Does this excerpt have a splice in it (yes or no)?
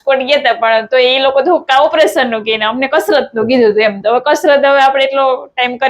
no